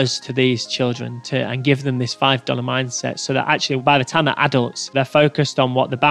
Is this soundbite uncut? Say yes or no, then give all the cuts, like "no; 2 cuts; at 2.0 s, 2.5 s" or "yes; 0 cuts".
no; 1 cut; at 4.8 s